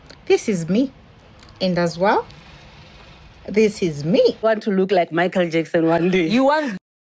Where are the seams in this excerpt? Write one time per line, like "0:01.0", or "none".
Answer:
0:04.4